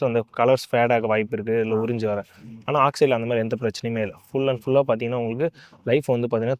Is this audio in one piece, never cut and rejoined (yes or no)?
yes